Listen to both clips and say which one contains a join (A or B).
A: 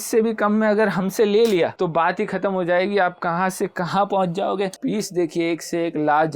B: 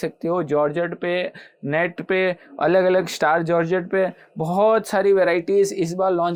A